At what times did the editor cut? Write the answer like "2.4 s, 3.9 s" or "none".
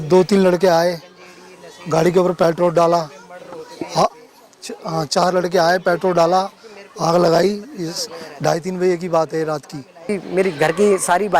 10.1 s